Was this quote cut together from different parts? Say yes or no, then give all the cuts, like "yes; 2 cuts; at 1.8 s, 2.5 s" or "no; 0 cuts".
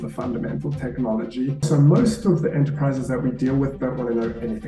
yes; 1 cut; at 1.6 s